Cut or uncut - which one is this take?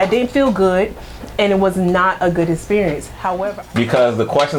cut